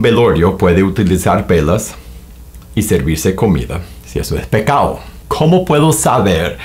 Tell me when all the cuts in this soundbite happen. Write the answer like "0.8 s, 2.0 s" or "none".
5.0 s